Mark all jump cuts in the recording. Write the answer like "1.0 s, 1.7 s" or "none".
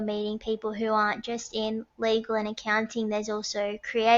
none